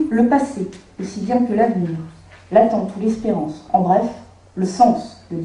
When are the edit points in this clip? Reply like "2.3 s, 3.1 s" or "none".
1.2 s